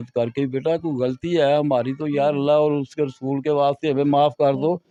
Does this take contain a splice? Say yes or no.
no